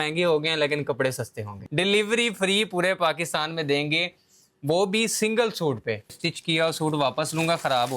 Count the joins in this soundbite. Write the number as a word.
two